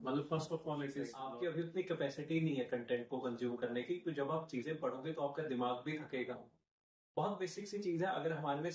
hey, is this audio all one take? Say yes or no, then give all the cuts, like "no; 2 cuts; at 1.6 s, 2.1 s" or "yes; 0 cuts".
no; 1 cut; at 1.1 s